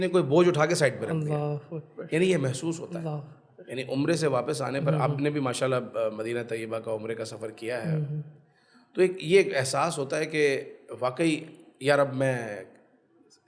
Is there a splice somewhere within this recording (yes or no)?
no